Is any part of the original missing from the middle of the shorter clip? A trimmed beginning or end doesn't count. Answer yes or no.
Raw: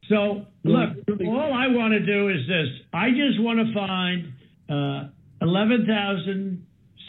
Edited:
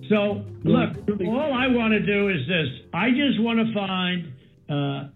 no